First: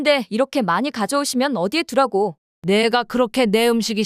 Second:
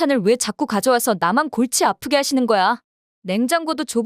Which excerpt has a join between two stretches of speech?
first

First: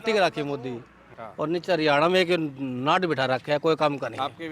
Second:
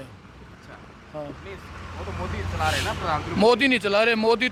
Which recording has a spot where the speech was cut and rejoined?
first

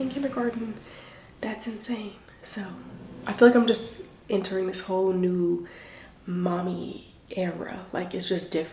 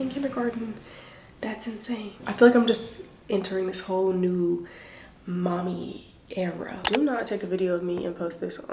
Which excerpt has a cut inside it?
second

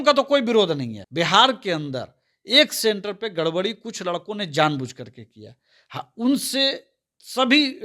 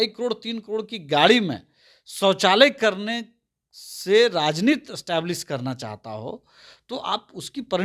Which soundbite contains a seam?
first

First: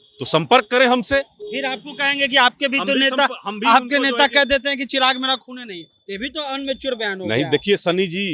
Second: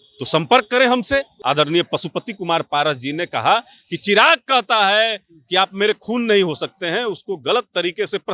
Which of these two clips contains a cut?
second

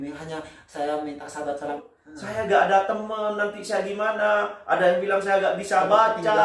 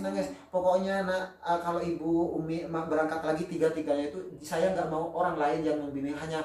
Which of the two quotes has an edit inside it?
first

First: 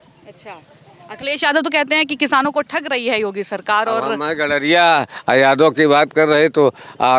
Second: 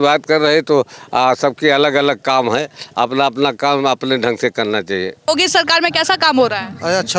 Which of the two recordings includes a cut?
second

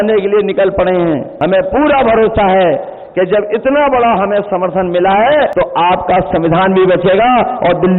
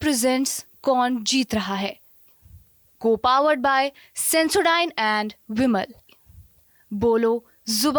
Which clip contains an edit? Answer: first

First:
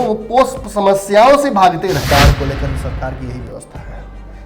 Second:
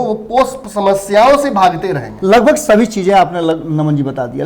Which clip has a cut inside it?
first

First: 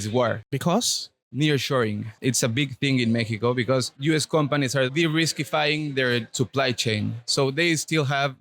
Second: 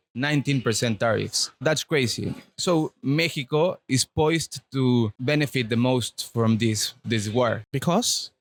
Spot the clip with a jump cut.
first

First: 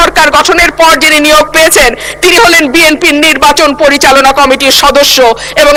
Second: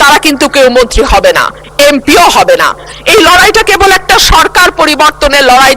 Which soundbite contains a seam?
second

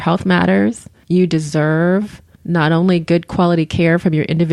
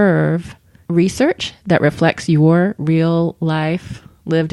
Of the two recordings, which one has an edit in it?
first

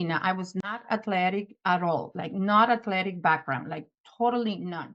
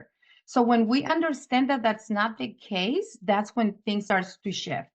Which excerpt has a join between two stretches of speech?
second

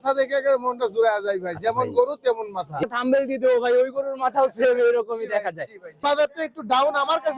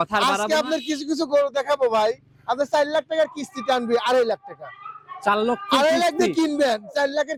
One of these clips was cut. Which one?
first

